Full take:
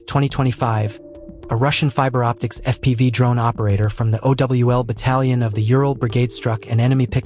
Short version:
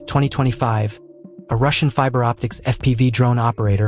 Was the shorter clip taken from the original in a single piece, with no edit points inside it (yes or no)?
yes